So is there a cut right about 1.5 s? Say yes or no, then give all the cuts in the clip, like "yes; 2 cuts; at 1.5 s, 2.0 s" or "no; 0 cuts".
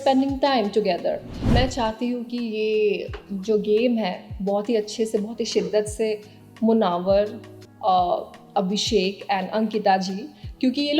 yes; 1 cut; at 1.5 s